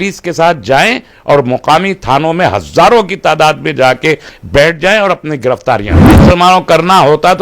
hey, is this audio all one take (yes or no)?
no